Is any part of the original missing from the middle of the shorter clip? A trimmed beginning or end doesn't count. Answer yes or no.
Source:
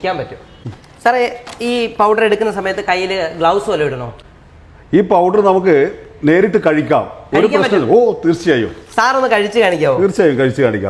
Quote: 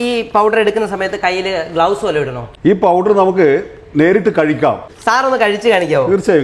yes